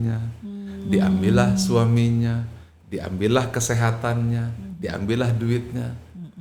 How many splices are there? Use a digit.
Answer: 0